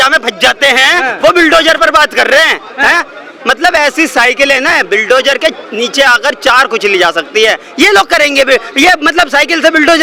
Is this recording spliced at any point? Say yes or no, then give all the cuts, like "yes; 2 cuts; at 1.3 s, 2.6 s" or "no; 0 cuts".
no; 0 cuts